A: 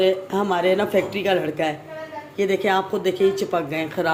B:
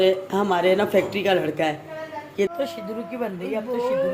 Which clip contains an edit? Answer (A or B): B